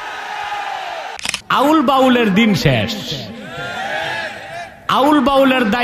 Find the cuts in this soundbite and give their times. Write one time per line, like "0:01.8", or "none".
0:01.2